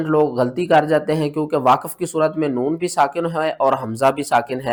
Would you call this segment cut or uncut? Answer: uncut